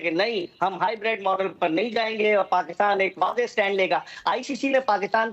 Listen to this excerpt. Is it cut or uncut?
uncut